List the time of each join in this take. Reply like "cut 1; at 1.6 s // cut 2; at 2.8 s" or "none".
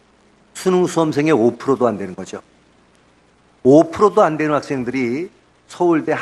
cut 1; at 2.2 s